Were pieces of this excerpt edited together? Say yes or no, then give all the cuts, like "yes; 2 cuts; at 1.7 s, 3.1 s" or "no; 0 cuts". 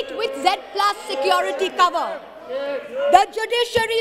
no; 0 cuts